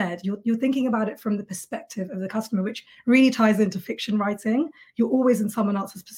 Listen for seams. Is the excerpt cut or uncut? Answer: uncut